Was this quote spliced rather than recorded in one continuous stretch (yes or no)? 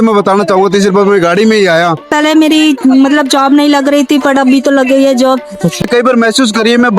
yes